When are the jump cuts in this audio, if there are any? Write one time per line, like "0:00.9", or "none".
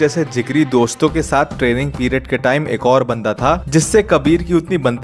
0:03.6